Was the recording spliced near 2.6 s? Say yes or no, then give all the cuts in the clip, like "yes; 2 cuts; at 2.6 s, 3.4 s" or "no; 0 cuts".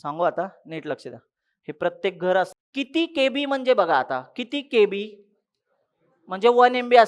yes; 1 cut; at 2.6 s